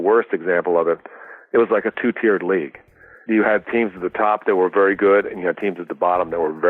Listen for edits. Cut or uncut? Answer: cut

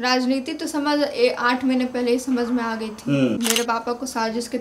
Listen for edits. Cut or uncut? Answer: cut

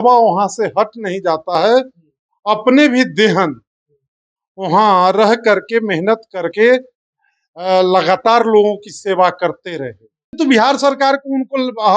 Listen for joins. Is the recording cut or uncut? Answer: cut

